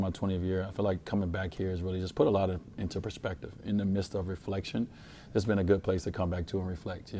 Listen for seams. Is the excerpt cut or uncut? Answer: uncut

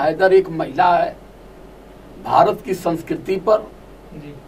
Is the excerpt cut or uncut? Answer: uncut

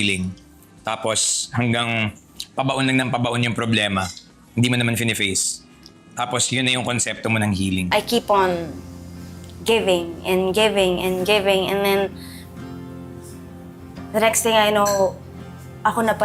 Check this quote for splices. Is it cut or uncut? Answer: cut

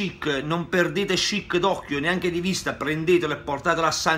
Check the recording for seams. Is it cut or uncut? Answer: uncut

